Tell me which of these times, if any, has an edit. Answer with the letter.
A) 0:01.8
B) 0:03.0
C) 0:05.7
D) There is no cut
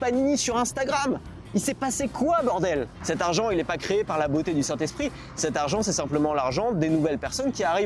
B